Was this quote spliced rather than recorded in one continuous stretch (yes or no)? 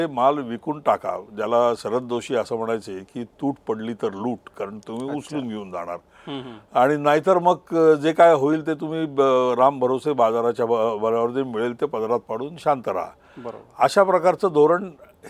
no